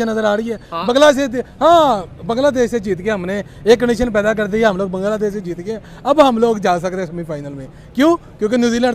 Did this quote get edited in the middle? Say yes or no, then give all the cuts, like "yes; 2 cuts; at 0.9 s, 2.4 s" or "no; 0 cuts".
no; 0 cuts